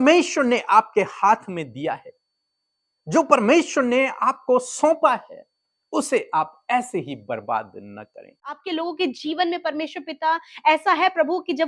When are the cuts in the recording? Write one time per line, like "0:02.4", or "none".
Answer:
0:08.6